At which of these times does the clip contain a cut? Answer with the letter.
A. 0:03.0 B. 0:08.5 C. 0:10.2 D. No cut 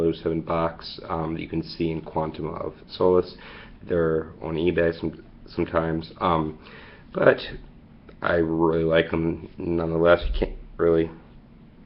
B